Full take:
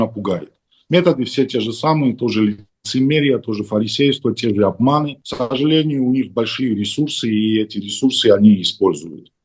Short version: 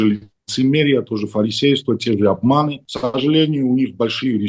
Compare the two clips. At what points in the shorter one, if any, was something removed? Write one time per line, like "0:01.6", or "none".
none